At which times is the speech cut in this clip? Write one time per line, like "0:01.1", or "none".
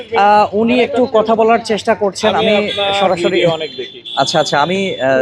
none